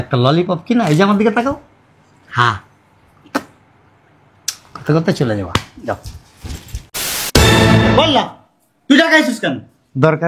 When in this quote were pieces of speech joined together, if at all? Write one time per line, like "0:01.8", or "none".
0:07.1

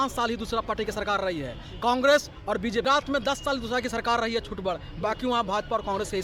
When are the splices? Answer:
0:02.9

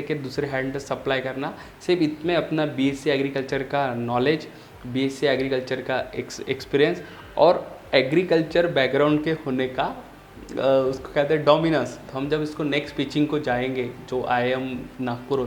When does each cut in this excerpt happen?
0:12.1

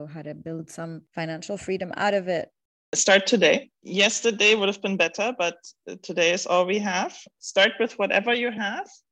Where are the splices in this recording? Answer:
0:02.9
0:03.8
0:07.3

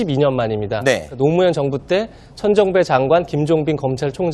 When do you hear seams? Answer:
none

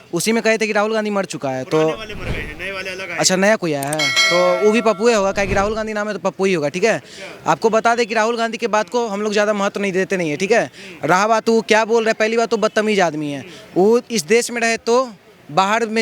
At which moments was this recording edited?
none

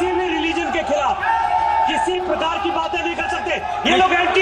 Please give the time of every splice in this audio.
none

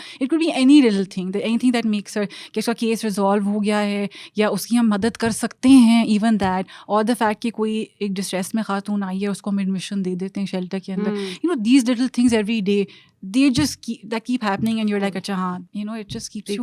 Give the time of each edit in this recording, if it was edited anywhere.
0:15.6

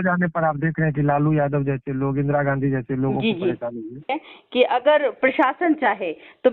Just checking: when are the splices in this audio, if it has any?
0:04.2

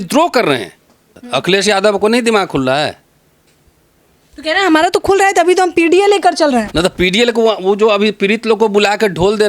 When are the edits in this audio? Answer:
0:01.2

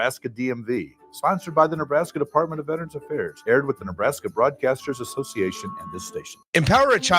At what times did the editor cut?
0:06.3

